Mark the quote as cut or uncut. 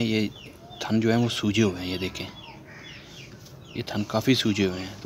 uncut